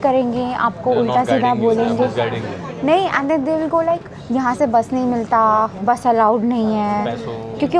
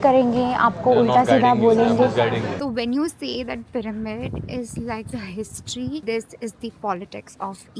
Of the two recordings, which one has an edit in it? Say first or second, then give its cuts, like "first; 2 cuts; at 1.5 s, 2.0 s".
second; 2 cuts; at 2.5 s, 6.0 s